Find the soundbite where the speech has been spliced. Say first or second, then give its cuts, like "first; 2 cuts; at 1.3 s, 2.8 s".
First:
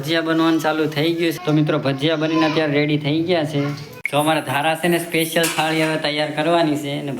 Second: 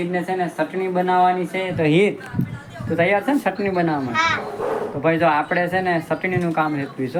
first; 2 cuts; at 1.4 s, 4.0 s